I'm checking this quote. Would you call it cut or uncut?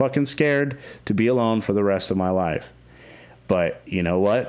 uncut